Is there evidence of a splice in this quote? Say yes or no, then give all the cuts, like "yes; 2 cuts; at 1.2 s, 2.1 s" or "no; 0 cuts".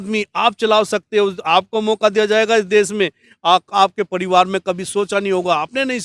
no; 0 cuts